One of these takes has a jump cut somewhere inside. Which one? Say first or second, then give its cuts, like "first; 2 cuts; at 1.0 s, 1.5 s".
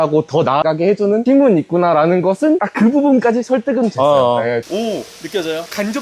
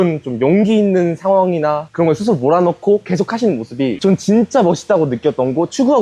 first; 3 cuts; at 1.1 s, 2.7 s, 4.7 s